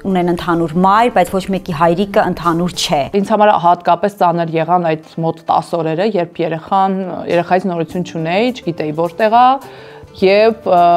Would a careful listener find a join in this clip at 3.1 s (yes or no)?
yes